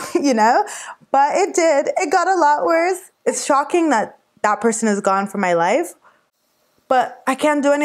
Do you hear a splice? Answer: yes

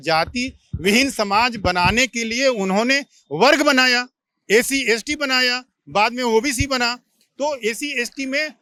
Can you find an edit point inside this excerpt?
no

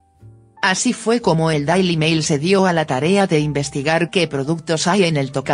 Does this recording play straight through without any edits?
no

